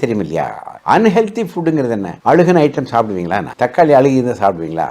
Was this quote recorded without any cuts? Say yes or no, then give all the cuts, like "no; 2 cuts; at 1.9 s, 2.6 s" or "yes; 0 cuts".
no; 2 cuts; at 2.1 s, 3.4 s